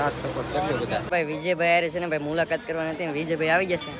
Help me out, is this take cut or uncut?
cut